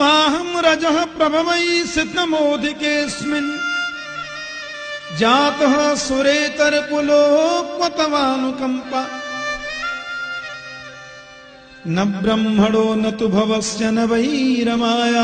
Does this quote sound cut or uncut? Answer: uncut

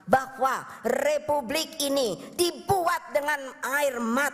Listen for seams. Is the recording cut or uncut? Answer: uncut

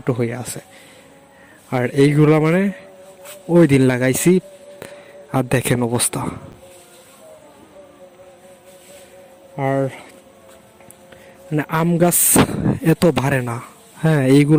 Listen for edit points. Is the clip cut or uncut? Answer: uncut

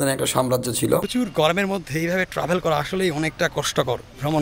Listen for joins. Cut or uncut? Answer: cut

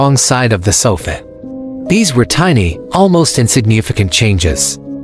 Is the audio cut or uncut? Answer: uncut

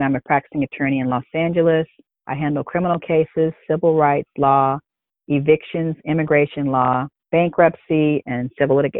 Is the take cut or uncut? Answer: cut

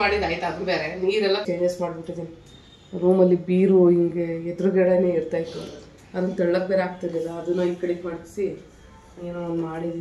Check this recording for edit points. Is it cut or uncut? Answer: cut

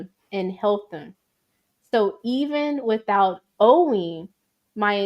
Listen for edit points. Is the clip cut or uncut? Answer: uncut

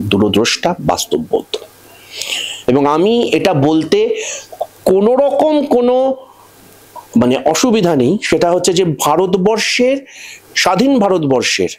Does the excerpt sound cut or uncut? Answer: uncut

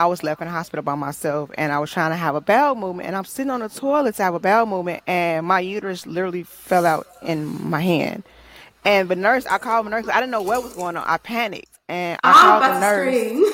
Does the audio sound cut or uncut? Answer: uncut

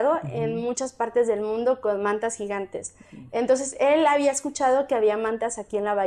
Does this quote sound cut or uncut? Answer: uncut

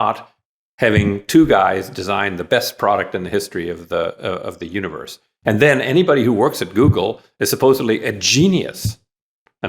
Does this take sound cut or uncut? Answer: uncut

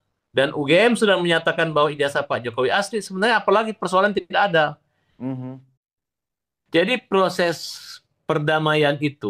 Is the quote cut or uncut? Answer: uncut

